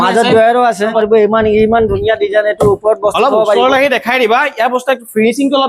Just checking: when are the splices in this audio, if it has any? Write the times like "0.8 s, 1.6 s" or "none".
0.9 s